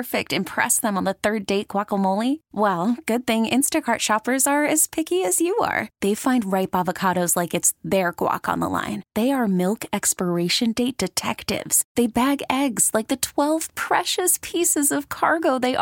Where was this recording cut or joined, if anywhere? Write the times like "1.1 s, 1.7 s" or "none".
none